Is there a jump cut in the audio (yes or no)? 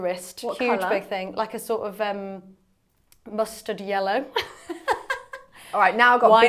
no